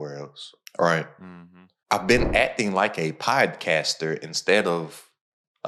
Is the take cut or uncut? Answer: uncut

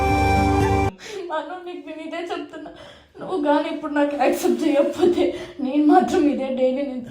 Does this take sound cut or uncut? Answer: cut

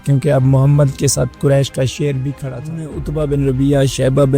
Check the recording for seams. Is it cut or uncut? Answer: cut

